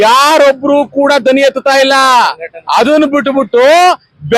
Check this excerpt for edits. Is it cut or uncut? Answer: uncut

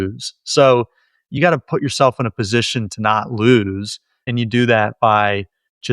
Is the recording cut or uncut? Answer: cut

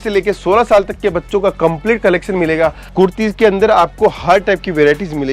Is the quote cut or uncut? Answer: cut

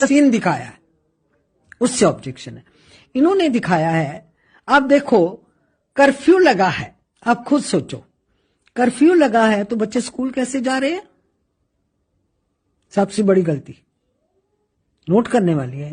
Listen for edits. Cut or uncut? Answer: uncut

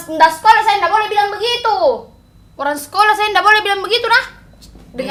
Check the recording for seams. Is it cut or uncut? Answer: uncut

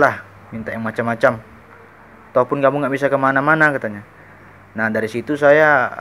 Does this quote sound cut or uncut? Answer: uncut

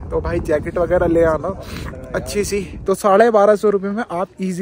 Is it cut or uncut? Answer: cut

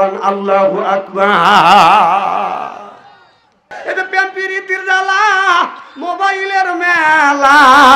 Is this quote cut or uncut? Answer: cut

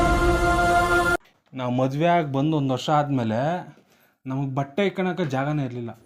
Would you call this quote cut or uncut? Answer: cut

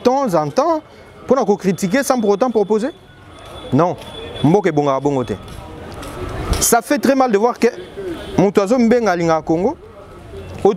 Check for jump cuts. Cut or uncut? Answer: uncut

